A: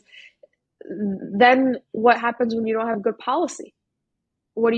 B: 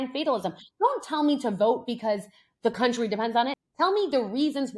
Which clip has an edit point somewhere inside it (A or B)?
B